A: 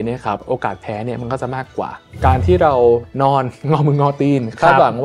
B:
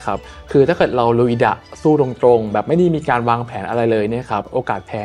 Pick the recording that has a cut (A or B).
A